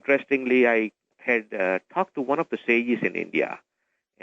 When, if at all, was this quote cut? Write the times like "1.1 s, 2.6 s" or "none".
1.1 s